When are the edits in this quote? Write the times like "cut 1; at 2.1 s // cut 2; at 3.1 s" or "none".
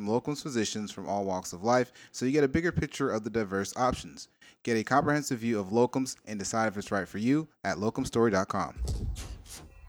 cut 1; at 8.8 s

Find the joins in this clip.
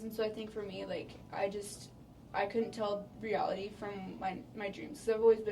cut 1; at 3.1 s

